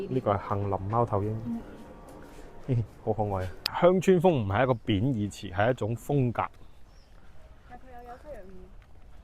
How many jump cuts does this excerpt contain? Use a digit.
1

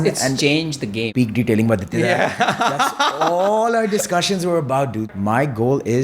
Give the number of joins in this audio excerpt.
2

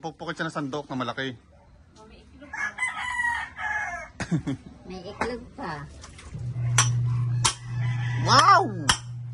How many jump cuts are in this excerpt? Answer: 0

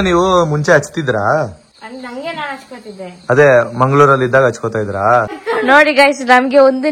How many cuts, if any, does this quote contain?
2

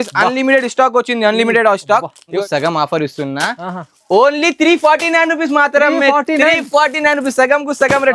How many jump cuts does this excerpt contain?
1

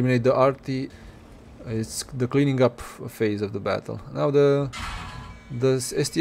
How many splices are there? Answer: 1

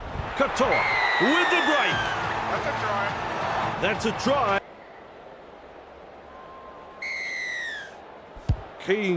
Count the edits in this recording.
1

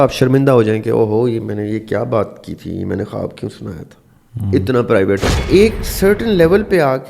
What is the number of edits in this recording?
1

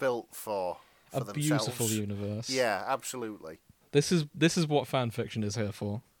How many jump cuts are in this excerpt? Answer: 0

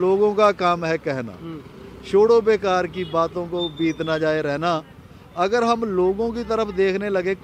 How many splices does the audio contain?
0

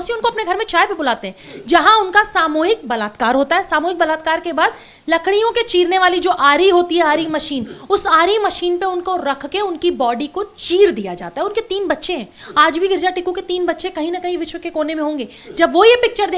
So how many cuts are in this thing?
0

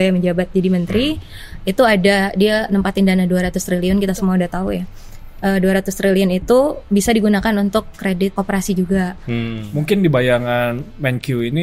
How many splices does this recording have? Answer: 1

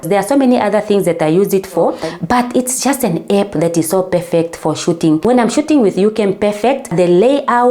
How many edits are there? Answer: 1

